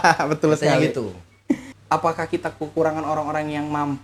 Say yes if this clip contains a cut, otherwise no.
yes